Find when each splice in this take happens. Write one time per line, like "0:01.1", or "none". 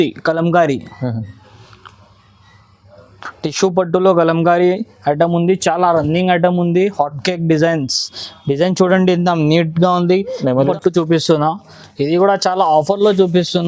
0:10.6